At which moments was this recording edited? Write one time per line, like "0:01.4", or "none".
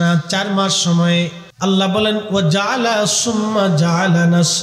0:01.4

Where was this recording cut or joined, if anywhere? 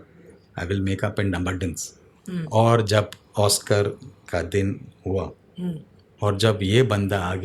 0:06.1

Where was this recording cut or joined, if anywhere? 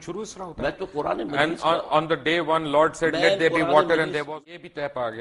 0:04.2

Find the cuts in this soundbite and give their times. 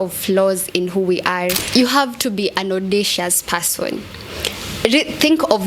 0:01.6

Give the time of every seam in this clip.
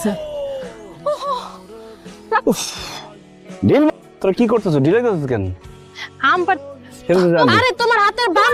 0:07.5

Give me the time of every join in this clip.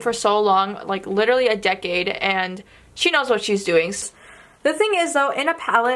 0:04.0

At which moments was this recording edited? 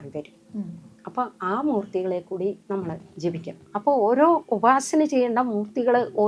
0:03.5

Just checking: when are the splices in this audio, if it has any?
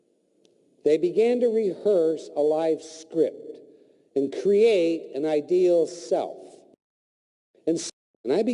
0:02.0

